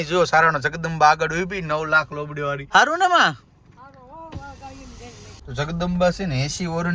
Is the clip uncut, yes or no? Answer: no